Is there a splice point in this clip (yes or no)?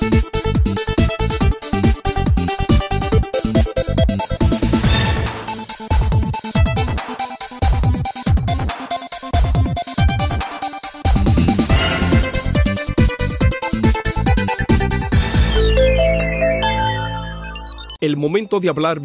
no